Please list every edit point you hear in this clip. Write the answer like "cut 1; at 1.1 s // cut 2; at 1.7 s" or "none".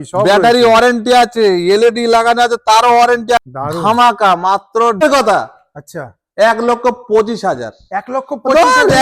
cut 1; at 3.4 s // cut 2; at 5.0 s

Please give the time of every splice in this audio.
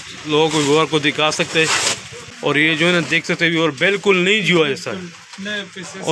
cut 1; at 2.2 s

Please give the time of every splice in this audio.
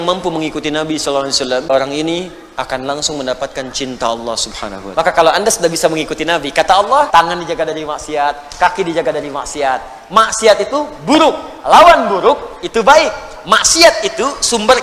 cut 1; at 1.7 s // cut 2; at 4.7 s // cut 3; at 7.1 s

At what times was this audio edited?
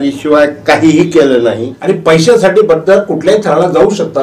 cut 1; at 1.7 s

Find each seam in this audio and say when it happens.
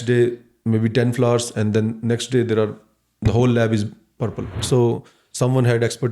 cut 1; at 4.6 s

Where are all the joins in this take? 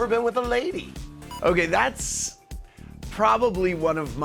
cut 1; at 1.2 s

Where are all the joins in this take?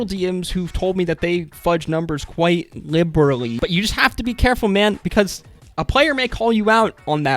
cut 1; at 3.5 s

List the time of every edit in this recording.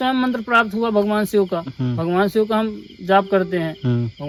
none

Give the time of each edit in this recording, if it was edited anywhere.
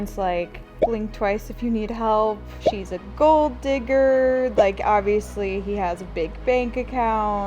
cut 1; at 0.8 s // cut 2; at 2.6 s

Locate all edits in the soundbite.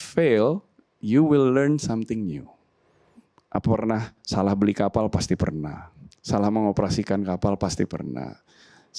cut 1; at 3.1 s

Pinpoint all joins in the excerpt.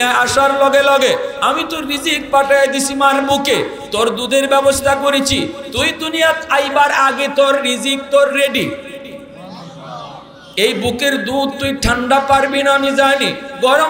cut 1; at 9.4 s // cut 2; at 10.4 s

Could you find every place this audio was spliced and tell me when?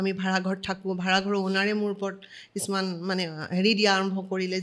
none

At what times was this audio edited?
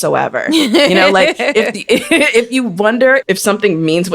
cut 1; at 3.2 s

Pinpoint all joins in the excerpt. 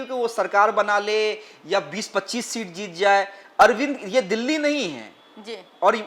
none

